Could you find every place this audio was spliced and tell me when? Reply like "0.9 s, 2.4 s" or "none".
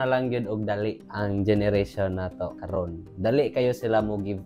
none